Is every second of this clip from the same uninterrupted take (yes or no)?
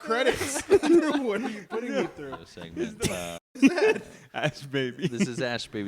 no